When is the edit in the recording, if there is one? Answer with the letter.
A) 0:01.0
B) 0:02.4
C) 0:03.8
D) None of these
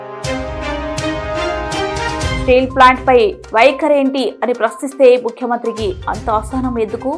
B